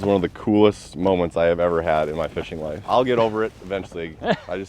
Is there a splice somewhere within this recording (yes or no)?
yes